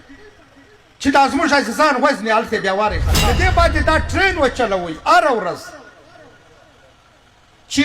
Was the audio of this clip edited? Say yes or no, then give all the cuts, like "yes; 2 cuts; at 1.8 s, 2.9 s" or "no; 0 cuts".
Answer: yes; 1 cut; at 3.1 s